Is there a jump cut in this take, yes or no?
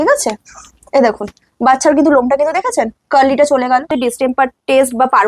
yes